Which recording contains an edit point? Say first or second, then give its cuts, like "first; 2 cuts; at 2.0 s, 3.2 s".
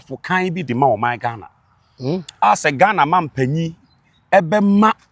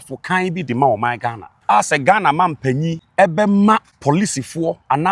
second; 3 cuts; at 1.5 s, 3.0 s, 3.9 s